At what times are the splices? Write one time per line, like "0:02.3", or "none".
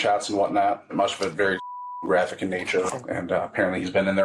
0:00.9
0:03.0